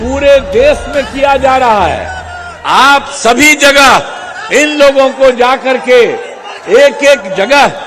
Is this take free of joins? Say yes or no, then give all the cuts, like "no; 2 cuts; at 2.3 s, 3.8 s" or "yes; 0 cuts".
yes; 0 cuts